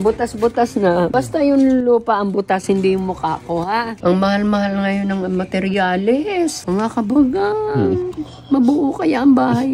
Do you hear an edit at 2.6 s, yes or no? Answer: no